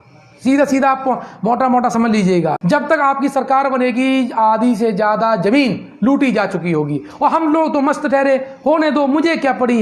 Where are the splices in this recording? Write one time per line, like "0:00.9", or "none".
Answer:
0:02.6